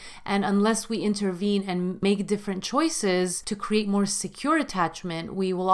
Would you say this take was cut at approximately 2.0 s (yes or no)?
yes